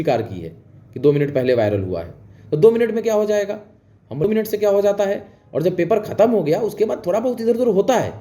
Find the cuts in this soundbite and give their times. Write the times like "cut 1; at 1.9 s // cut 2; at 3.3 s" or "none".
cut 1; at 4.2 s